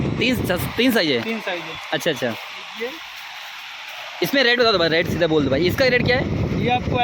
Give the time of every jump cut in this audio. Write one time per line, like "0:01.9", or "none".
none